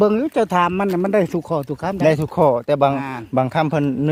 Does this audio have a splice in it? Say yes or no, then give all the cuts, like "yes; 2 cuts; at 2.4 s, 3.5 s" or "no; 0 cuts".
no; 0 cuts